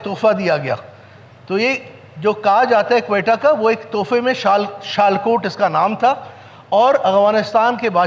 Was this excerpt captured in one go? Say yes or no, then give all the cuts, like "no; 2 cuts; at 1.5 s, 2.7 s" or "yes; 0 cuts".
yes; 0 cuts